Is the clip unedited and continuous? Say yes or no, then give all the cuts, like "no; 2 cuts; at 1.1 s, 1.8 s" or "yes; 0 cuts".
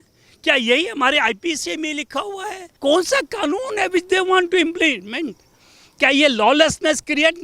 no; 1 cut; at 2.8 s